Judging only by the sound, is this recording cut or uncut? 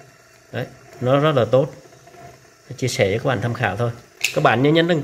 cut